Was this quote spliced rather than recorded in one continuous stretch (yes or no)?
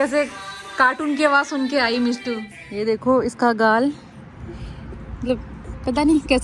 yes